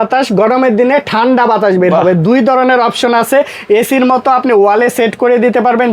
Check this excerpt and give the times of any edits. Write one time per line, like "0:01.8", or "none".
none